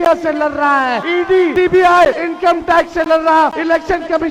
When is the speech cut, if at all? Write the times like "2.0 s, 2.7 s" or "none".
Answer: 1.3 s, 2.2 s, 3.6 s

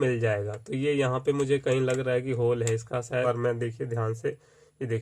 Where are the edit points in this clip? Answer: 3.2 s

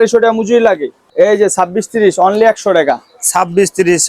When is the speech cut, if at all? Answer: 1.0 s

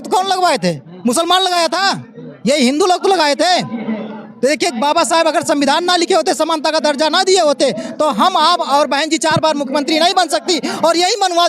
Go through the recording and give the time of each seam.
none

